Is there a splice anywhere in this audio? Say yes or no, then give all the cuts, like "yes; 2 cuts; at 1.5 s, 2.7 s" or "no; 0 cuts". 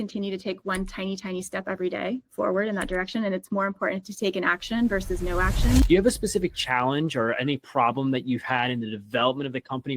yes; 1 cut; at 5.8 s